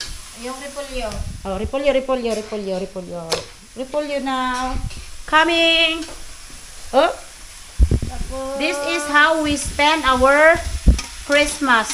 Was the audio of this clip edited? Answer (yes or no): no